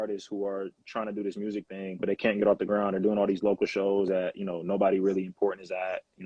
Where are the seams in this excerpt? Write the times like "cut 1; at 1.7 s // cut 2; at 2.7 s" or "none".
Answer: none